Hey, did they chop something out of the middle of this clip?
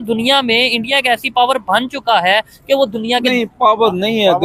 no; 0 cuts

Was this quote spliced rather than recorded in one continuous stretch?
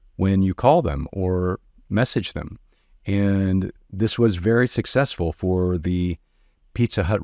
no; 0 cuts

